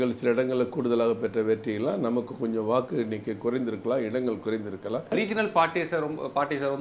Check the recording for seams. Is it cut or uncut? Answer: cut